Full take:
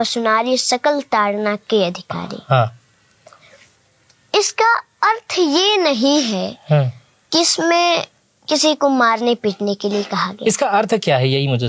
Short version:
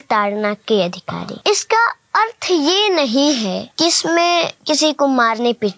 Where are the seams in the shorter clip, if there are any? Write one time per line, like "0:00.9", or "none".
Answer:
0:01.3
0:03.7
0:04.6